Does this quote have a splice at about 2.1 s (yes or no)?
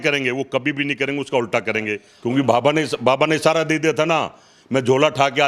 yes